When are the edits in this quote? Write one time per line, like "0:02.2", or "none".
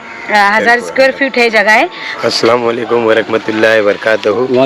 0:02.0